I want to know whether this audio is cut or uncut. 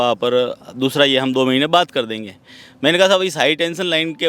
uncut